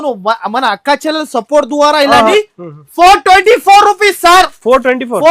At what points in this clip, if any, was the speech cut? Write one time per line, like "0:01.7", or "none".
0:02.3